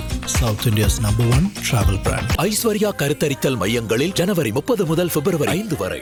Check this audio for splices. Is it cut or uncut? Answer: uncut